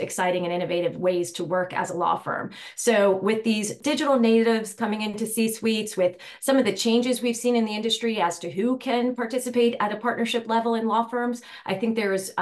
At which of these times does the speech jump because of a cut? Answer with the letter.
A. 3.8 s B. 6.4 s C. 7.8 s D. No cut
A